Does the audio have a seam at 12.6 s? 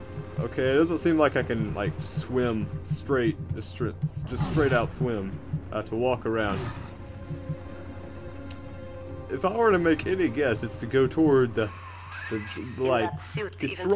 yes; 1 cut; at 12.6 s

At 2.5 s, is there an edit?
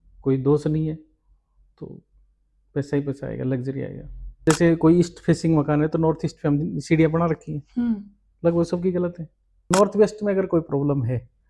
no; 2 cuts; at 4.4 s, 9.6 s

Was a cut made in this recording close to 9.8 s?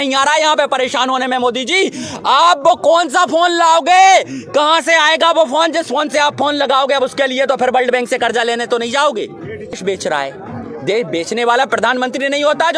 yes; 1 cut; at 9.8 s

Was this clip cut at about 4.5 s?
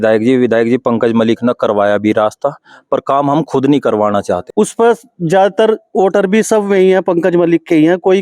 yes; 1 cut; at 4.5 s

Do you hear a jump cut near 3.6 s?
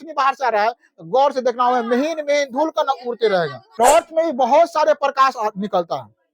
yes; 1 cut; at 3.6 s

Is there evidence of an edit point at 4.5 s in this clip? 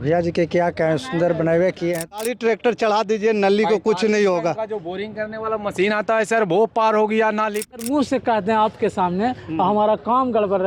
no; 2 cuts; at 2.1 s, 7.7 s

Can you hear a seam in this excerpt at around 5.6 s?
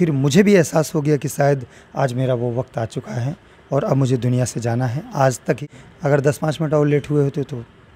yes; 1 cut; at 5.6 s

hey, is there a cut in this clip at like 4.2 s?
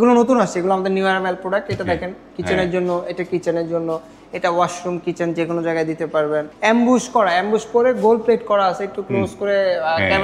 no; 1 cut; at 6.5 s

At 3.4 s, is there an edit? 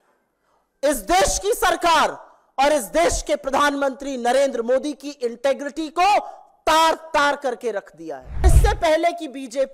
no; 1 cut; at 8.4 s

